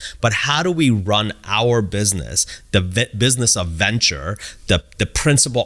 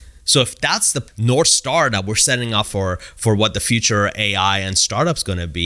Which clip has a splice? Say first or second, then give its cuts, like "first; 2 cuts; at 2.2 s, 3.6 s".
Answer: second; 1 cut; at 1.1 s